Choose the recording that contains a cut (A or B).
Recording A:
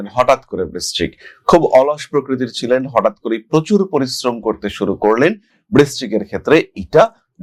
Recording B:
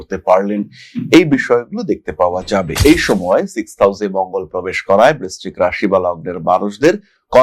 B